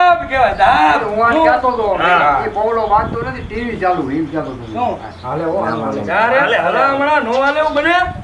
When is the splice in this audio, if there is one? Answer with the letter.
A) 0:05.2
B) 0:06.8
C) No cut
A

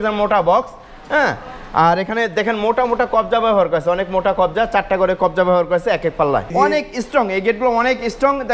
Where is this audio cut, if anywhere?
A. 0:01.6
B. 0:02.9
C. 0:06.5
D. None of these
C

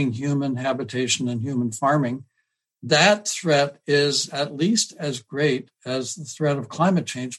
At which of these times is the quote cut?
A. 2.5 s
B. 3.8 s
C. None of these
A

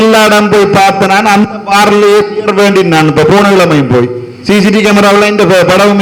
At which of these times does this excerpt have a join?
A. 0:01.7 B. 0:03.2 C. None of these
C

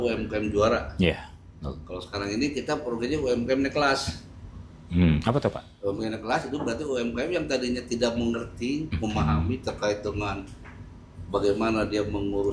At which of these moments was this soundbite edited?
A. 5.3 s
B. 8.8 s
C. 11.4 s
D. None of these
D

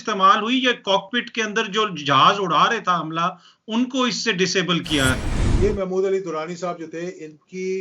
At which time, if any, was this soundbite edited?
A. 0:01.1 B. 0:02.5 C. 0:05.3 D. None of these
C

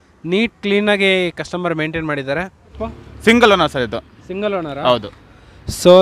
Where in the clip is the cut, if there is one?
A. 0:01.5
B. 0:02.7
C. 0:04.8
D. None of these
B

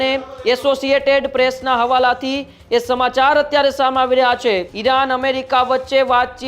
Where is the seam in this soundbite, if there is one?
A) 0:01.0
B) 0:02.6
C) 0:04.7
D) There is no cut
C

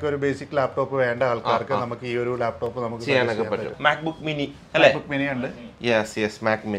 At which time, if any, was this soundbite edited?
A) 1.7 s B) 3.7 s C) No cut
C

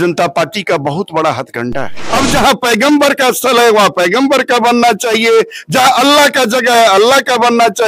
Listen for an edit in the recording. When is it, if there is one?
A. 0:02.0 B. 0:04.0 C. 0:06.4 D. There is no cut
A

